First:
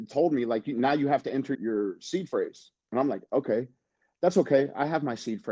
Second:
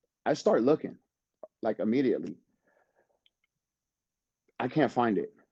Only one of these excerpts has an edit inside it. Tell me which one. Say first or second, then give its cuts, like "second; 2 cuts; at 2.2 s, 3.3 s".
first; 1 cut; at 1.5 s